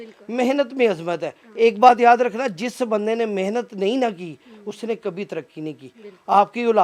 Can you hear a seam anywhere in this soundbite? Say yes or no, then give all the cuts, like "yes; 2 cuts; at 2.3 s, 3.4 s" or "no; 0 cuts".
no; 0 cuts